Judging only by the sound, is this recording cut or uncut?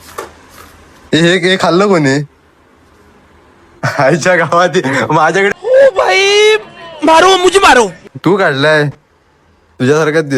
cut